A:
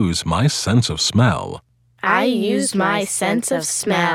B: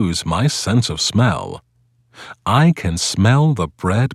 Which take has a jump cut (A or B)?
B